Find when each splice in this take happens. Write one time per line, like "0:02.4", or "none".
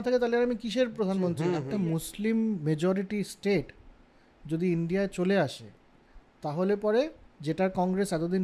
0:01.7

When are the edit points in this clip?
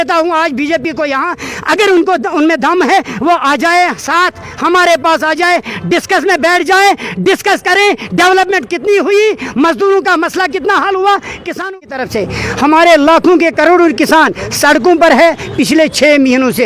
0:11.8

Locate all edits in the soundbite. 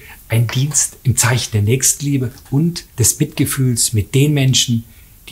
0:02.9

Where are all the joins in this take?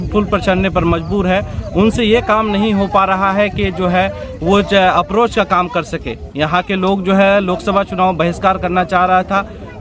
none

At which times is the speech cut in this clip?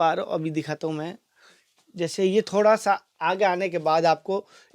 none

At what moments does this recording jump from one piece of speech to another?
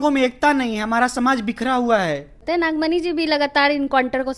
0:02.3

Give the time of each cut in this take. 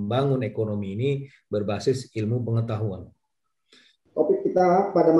0:04.0

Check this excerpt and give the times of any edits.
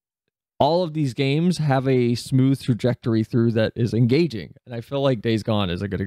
none

